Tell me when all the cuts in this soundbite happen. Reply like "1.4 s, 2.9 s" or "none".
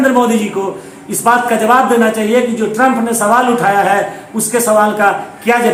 none